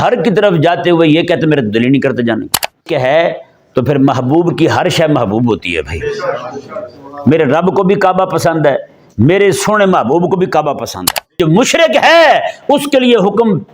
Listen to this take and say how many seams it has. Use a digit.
2